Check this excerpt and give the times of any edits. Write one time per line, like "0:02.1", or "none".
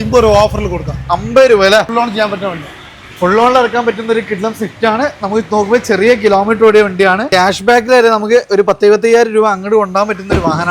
0:01.9
0:07.3